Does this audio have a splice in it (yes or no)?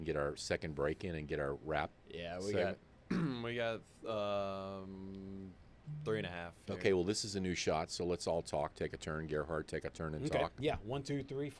no